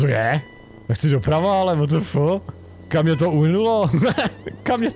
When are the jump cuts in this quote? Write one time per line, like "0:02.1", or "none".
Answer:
none